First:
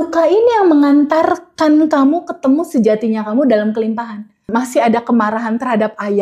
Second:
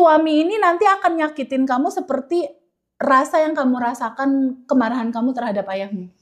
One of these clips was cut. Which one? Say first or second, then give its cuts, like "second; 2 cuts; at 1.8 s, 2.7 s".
first; 1 cut; at 4.5 s